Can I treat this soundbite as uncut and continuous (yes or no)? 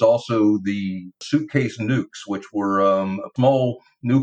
no